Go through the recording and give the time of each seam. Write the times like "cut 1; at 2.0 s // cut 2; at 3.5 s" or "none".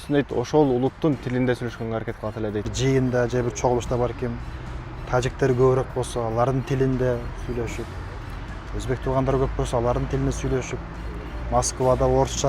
cut 1; at 2.7 s